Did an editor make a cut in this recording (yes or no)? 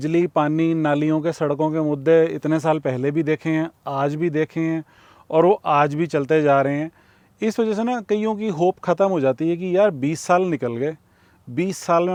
no